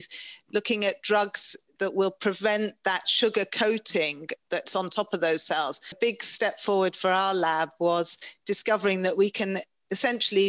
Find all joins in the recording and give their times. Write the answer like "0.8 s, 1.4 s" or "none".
3.1 s, 6.0 s